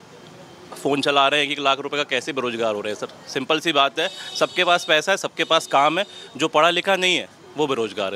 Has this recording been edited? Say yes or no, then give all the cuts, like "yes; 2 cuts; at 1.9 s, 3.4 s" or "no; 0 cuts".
no; 0 cuts